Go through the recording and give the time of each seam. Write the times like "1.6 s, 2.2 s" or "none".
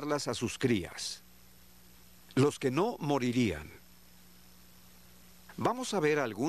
none